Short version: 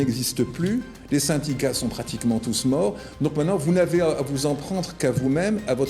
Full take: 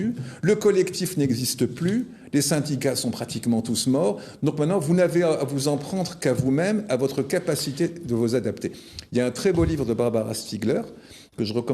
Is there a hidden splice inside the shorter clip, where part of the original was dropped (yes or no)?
no